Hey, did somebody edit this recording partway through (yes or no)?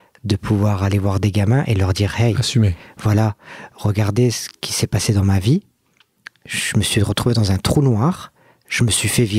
no